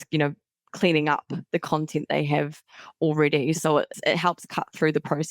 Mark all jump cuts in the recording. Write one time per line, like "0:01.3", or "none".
0:03.9